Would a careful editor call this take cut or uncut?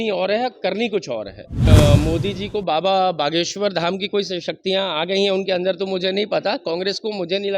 cut